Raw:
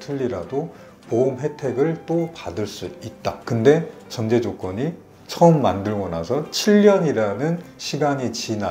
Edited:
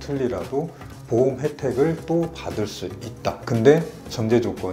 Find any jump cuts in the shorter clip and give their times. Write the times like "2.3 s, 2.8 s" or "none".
none